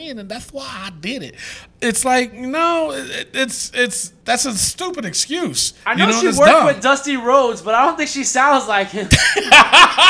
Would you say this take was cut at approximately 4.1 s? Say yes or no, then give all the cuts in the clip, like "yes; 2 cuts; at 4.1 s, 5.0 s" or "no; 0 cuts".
yes; 2 cuts; at 4.1 s, 5.7 s